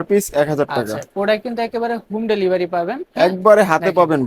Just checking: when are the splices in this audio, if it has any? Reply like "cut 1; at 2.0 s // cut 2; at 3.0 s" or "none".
none